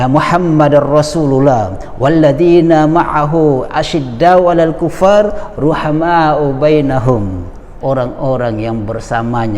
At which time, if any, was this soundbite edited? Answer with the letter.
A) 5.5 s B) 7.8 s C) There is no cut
B